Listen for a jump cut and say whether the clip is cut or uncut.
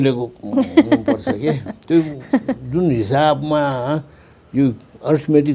uncut